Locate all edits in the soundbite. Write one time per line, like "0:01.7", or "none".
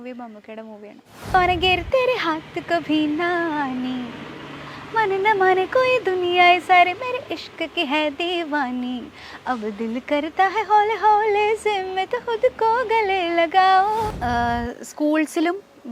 0:01.3
0:14.1